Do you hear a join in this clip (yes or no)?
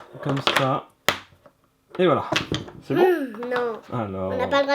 yes